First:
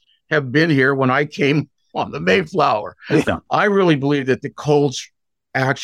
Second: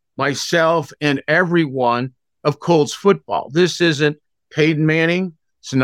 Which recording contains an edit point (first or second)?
first